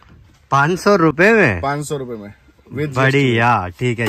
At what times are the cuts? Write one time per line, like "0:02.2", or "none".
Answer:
none